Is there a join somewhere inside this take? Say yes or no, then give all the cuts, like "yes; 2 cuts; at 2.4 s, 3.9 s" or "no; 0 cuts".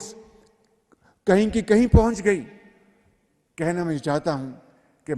no; 0 cuts